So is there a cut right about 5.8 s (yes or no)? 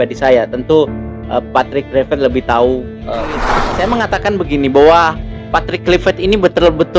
no